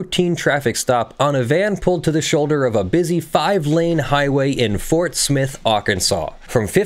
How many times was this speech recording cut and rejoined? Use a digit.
0